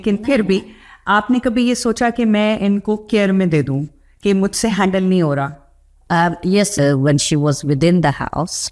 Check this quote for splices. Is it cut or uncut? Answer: cut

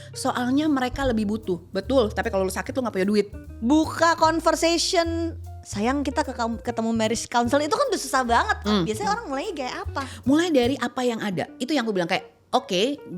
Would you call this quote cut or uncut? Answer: cut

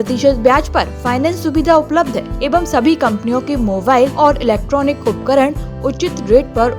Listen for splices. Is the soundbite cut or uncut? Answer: cut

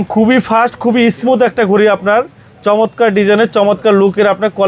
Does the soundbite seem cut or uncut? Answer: uncut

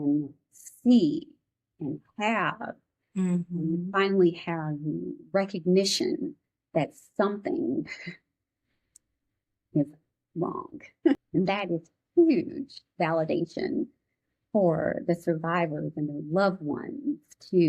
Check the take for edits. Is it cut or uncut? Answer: cut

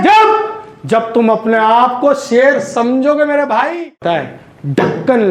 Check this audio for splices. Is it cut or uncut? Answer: cut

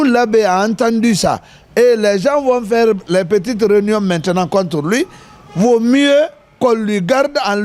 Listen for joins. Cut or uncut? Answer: uncut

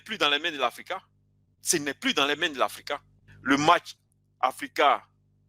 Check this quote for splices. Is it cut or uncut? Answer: cut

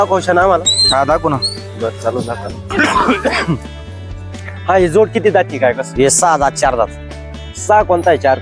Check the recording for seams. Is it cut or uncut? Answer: cut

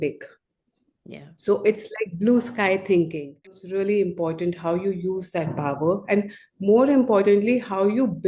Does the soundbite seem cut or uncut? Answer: cut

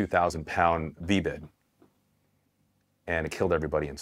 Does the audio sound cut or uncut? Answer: cut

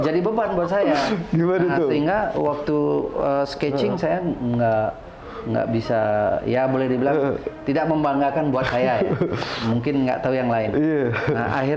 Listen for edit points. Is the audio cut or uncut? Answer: uncut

